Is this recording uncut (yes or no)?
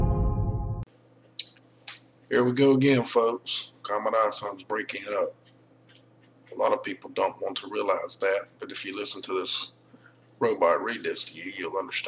yes